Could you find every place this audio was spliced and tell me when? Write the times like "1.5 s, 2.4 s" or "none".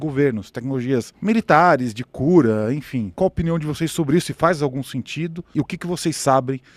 1.1 s, 3.1 s